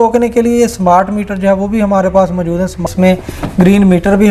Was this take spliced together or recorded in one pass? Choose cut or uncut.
cut